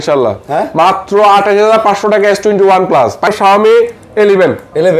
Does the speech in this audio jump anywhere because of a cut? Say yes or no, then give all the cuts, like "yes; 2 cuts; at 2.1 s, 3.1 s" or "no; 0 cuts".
yes; 1 cut; at 3.3 s